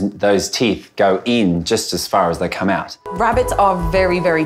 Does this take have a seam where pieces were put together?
yes; 1 cut; at 3.0 s

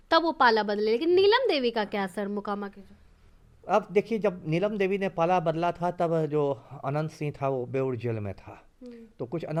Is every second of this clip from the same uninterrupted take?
yes; 0 cuts

